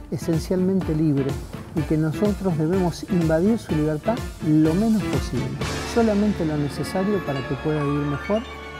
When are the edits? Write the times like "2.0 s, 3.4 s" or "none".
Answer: none